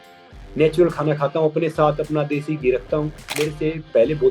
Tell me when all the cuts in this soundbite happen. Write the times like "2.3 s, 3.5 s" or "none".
3.3 s